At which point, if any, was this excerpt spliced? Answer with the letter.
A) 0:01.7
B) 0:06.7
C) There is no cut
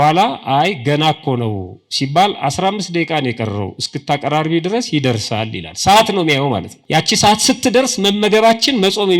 B